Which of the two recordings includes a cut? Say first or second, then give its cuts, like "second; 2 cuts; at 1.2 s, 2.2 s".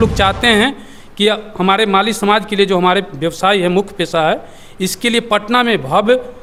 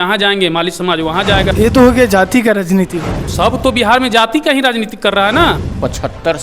second; 3 cuts; at 1.5 s, 3.3 s, 5.6 s